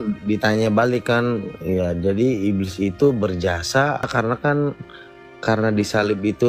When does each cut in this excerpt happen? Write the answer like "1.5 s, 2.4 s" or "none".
4.1 s